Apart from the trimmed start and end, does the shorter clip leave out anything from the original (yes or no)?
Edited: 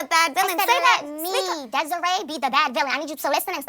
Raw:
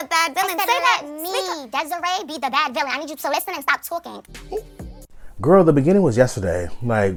no